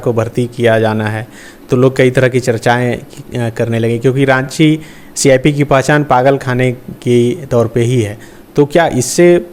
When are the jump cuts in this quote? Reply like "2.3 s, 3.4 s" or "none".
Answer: none

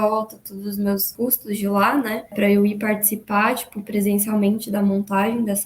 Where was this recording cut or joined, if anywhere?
1.1 s, 2.3 s

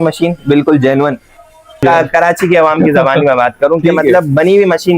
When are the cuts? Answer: 1.8 s

